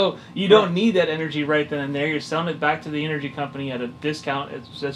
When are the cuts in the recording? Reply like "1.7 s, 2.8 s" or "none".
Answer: none